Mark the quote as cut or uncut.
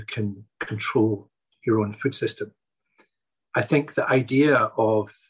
cut